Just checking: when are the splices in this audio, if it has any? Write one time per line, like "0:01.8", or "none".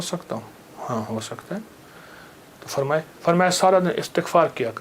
none